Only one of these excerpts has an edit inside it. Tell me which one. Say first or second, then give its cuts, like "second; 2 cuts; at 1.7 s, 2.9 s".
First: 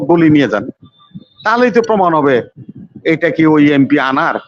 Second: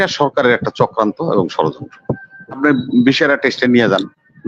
second; 1 cut; at 2.6 s